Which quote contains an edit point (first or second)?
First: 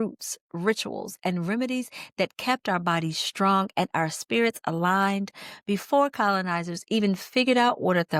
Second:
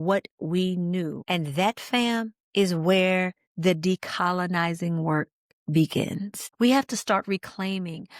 second